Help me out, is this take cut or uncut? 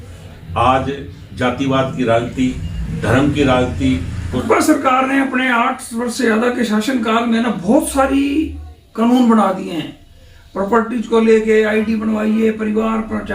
cut